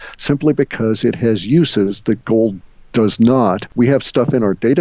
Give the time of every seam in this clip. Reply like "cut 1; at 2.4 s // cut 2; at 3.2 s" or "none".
cut 1; at 3.7 s